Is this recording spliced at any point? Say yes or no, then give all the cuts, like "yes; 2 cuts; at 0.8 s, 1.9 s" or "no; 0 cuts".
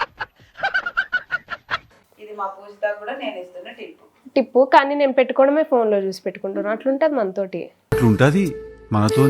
yes; 1 cut; at 1.9 s